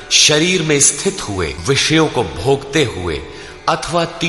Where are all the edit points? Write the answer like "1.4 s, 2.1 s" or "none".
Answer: 1.6 s